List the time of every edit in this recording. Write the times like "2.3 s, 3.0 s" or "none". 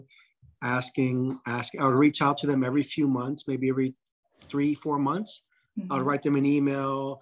none